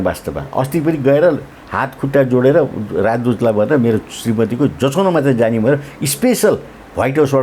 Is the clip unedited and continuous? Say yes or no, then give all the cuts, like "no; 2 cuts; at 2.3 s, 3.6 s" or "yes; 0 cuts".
yes; 0 cuts